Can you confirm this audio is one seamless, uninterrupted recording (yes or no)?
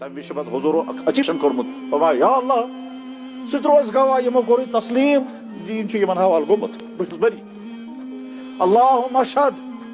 no